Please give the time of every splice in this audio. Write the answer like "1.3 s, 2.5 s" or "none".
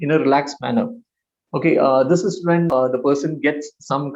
2.7 s